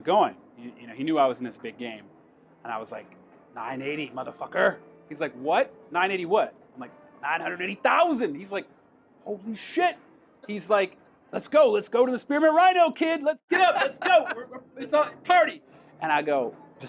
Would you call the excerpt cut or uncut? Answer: uncut